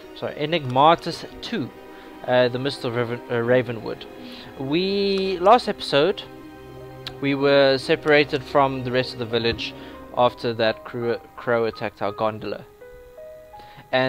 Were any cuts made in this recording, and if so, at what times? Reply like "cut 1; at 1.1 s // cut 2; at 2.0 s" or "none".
none